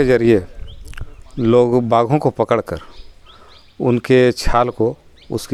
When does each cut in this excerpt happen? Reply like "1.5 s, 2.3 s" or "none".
none